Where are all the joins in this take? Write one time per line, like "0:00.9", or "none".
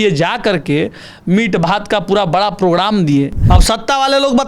0:03.4